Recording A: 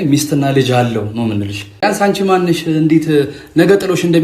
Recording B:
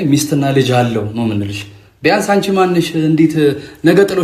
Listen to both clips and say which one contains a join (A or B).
A